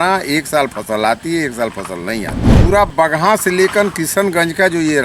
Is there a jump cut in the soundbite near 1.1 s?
no; 1 cut; at 2.6 s

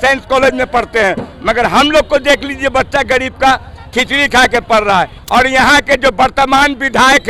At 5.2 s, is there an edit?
yes; 1 cut; at 5.2 s

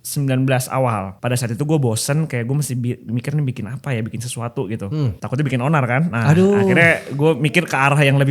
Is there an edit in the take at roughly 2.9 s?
no; 2 cuts; at 1.1 s, 5.2 s

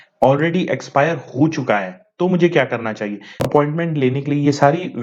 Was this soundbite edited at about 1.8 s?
no; 1 cut; at 3.3 s

